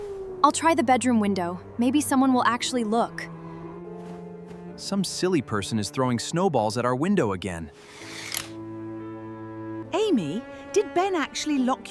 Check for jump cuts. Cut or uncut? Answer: uncut